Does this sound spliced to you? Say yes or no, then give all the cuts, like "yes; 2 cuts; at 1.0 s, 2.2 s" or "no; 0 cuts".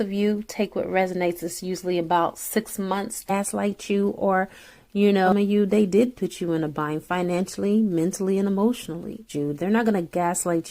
yes; 3 cuts; at 3.3 s, 5.3 s, 9.2 s